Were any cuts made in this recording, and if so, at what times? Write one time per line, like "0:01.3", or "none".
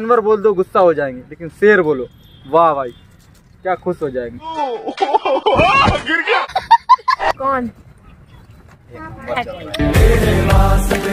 0:07.3